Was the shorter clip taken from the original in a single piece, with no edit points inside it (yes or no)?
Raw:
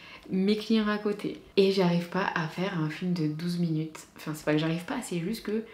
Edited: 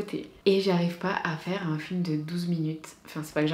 yes